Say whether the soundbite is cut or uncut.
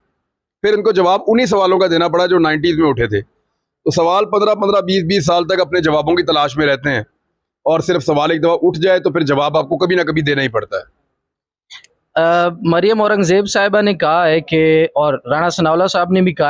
uncut